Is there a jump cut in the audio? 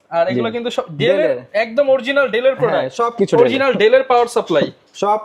no; 0 cuts

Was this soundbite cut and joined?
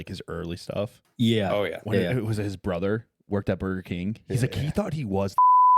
yes; 1 cut; at 1.0 s

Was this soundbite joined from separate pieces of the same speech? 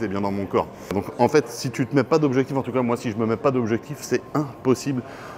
yes; 1 cut; at 0.9 s

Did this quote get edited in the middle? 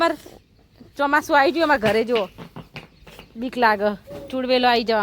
no; 0 cuts

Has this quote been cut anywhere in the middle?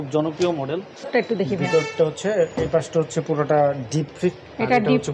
yes; 1 cut; at 1.1 s

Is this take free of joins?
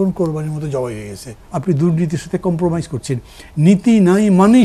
no; 1 cut; at 1.5 s

